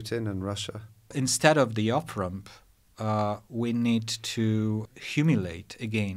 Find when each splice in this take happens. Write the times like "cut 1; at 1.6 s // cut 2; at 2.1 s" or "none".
cut 1; at 1.1 s // cut 2; at 4.9 s